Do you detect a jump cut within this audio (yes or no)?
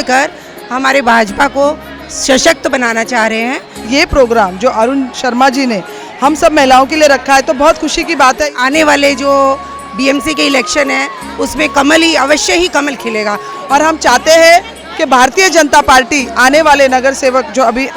yes